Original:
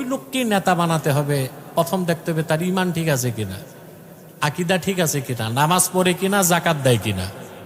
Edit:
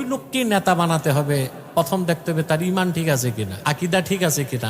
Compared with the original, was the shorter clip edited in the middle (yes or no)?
yes